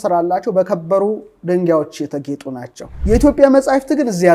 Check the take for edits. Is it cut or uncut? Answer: cut